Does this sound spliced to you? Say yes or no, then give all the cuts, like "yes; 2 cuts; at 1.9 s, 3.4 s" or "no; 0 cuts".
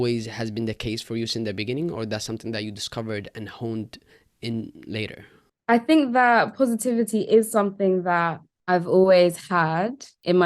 no; 0 cuts